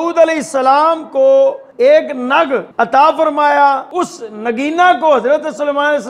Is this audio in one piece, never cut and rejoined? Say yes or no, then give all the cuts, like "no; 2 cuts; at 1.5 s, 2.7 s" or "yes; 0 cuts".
no; 3 cuts; at 1.7 s, 2.7 s, 3.9 s